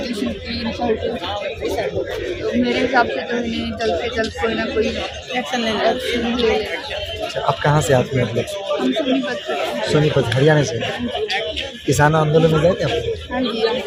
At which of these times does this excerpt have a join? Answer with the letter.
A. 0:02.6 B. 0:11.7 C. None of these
C